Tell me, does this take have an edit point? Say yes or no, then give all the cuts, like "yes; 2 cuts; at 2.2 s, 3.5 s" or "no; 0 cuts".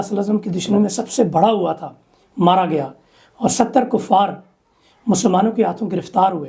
no; 0 cuts